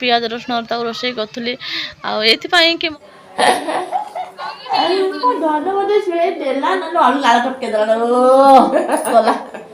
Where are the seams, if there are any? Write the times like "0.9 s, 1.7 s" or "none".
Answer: 2.9 s